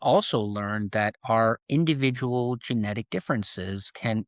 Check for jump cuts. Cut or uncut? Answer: uncut